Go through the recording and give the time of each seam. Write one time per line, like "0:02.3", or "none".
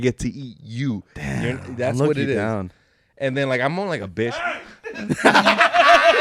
none

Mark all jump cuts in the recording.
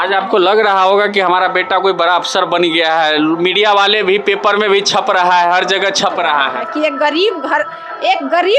none

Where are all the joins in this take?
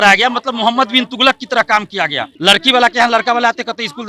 0:02.3

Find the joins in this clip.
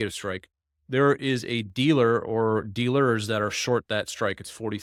none

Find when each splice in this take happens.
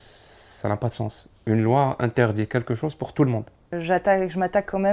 0:03.8

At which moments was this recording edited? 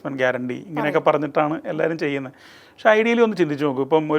none

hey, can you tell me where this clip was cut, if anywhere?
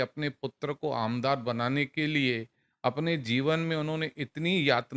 none

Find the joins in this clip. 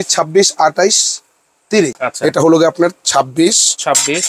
0:02.0

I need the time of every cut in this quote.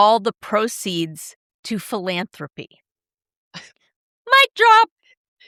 none

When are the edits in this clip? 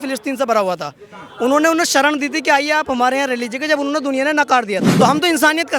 0:04.9

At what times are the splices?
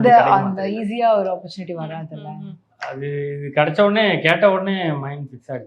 none

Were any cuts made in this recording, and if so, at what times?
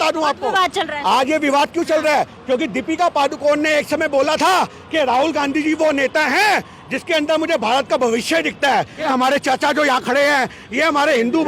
0:09.0

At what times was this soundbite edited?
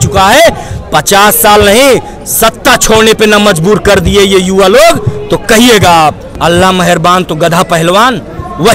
0:06.3

